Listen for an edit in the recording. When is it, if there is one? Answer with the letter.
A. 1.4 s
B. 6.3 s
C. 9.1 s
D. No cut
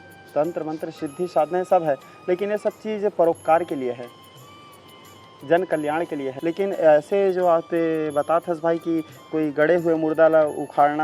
B